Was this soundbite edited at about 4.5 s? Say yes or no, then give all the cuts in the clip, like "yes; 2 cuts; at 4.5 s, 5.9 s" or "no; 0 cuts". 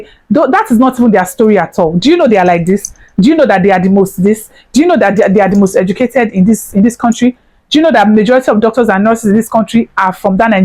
no; 0 cuts